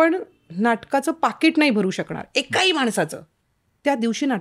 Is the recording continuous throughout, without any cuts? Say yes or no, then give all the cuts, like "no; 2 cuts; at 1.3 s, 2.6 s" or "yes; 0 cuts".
yes; 0 cuts